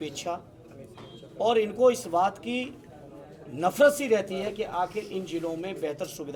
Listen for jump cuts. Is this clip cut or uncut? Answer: uncut